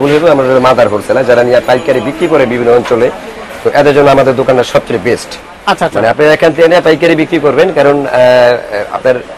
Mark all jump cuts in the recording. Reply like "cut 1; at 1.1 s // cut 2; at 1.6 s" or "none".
none